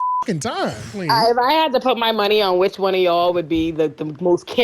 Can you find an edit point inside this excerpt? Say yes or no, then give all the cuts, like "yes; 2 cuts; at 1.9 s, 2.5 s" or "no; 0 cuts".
yes; 1 cut; at 0.9 s